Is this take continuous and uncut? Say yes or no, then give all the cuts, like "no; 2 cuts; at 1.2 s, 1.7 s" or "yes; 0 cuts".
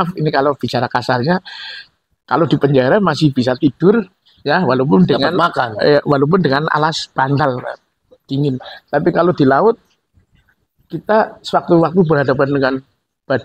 yes; 0 cuts